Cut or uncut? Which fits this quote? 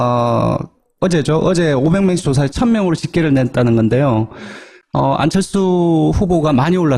uncut